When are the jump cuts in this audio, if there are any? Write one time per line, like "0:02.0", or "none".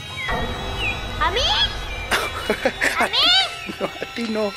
none

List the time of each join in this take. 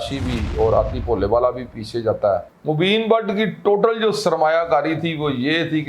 0:02.5

